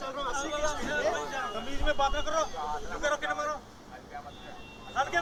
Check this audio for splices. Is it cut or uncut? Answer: uncut